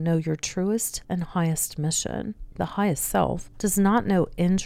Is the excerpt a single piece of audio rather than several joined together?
no; 3 cuts; at 0.9 s, 2.4 s, 3.5 s

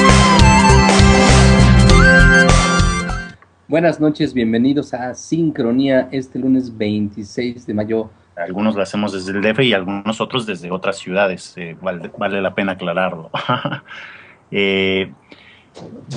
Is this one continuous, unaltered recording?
yes; 0 cuts

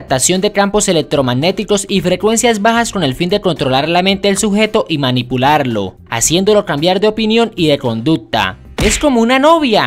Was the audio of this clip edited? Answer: yes; 1 cut; at 3.4 s

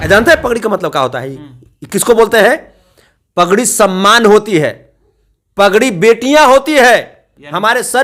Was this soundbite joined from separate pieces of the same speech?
no; 0 cuts

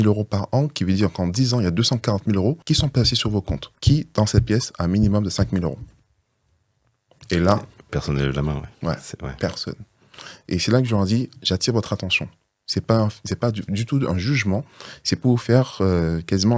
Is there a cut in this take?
no; 0 cuts

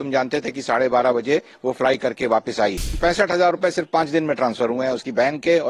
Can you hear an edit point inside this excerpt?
yes; 1 cut; at 2.9 s

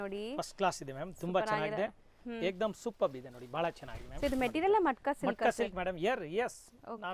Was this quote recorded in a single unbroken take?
yes; 0 cuts

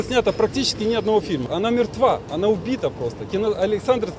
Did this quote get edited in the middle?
yes; 1 cut; at 1.5 s

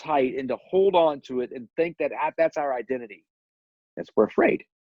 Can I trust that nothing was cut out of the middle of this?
no; 1 cut; at 3.9 s

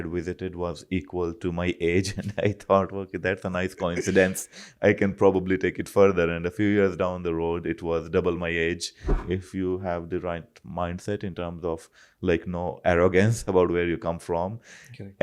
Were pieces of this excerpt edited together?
yes; 1 cut; at 9.1 s

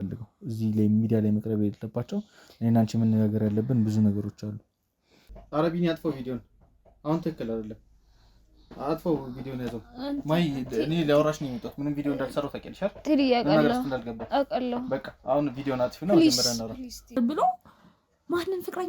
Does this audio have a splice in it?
yes; 2 cuts; at 5.4 s, 17.2 s

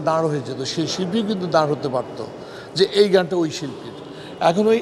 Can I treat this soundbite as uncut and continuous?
yes; 0 cuts

